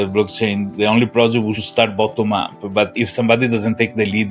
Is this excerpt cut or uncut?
cut